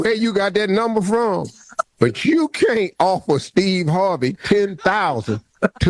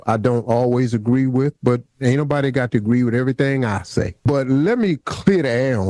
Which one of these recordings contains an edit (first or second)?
second